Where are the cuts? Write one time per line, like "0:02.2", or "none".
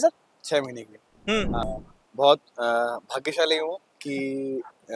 0:01.6